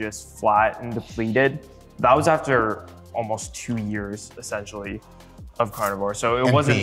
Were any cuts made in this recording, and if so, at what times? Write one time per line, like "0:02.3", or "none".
none